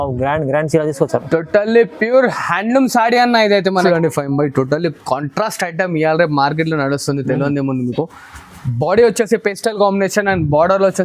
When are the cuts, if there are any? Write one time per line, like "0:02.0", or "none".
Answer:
0:03.8